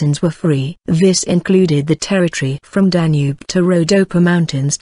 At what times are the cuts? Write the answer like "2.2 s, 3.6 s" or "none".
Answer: 2.1 s